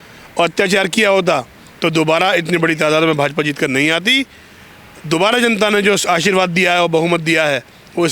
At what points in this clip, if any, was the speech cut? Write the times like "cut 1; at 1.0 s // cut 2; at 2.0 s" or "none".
none